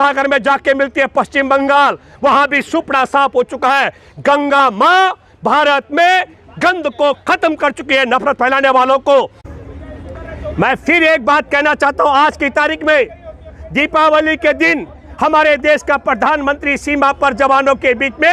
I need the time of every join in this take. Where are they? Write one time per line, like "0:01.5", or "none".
0:09.4